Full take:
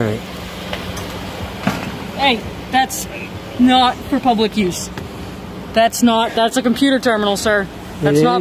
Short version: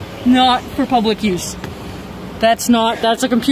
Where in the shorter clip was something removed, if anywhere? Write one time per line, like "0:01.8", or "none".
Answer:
none